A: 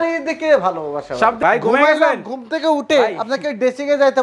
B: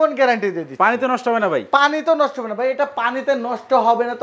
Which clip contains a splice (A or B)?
A